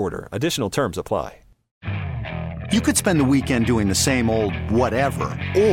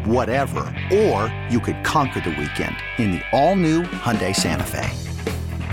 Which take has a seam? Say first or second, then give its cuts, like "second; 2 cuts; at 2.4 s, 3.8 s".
first; 1 cut; at 1.9 s